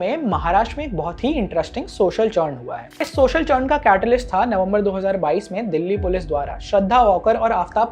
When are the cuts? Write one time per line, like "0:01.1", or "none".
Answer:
0:03.0